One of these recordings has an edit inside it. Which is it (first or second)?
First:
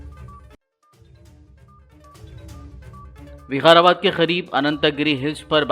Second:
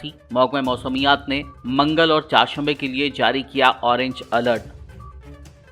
first